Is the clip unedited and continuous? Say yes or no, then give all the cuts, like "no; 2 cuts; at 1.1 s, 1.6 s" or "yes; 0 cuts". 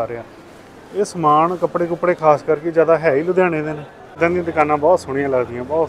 no; 1 cut; at 4.2 s